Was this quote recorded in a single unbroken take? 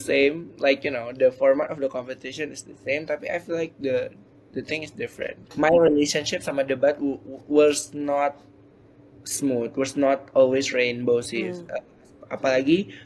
no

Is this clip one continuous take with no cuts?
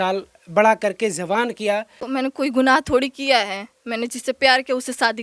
no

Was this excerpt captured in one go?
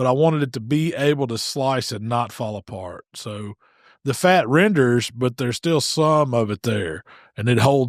yes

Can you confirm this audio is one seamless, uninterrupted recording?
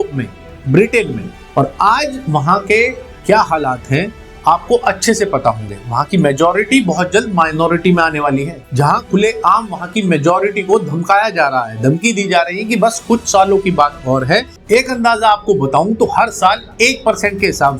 no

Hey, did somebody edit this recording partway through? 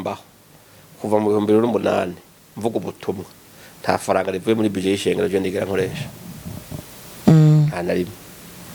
no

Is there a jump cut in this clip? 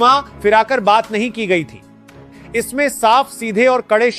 no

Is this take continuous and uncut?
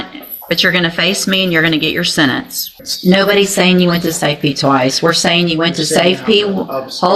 no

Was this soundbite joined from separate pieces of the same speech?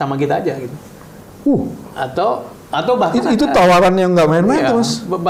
no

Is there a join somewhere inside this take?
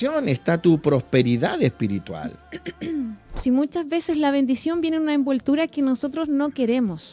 yes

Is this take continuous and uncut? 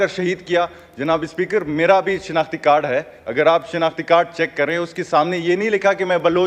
yes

